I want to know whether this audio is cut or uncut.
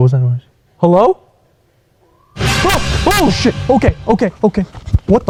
uncut